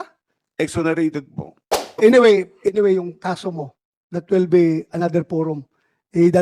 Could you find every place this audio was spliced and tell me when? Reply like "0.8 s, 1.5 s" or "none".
2.0 s